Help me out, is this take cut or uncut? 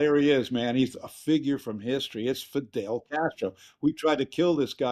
uncut